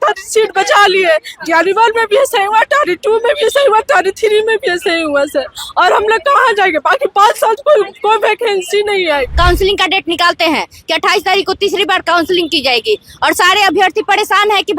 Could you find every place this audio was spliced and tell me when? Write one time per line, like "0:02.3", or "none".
0:09.3